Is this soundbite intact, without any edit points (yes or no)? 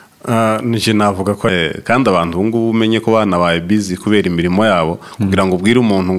no